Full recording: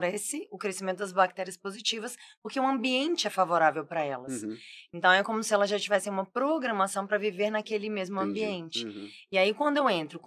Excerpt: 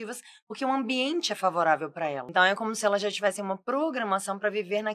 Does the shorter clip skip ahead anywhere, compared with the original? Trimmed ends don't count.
yes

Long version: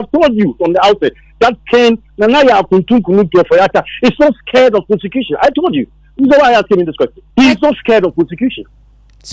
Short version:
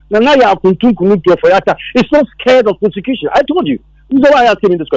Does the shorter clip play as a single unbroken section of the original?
yes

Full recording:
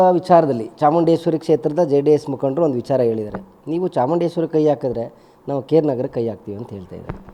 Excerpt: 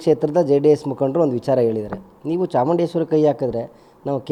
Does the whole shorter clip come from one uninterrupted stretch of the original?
yes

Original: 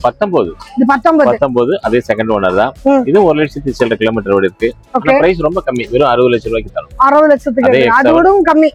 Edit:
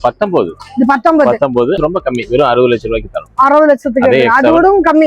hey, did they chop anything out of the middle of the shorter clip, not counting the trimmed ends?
yes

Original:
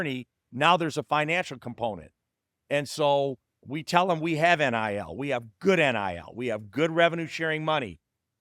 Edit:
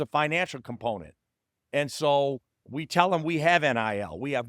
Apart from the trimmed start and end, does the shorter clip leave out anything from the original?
no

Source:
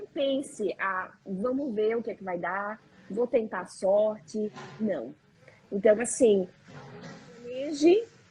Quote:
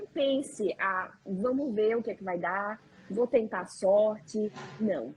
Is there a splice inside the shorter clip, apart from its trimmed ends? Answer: no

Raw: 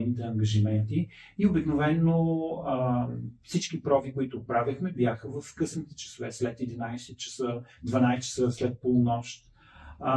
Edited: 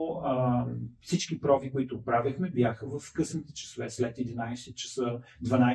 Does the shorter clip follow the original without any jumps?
yes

